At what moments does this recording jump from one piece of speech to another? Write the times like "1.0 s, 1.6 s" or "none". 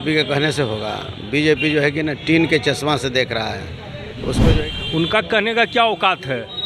4.4 s